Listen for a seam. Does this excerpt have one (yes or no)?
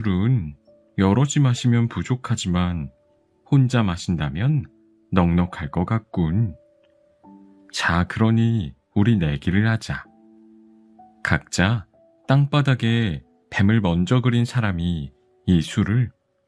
no